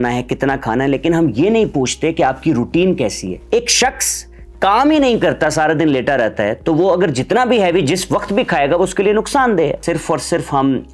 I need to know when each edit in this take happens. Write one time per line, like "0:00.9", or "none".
0:03.3
0:09.8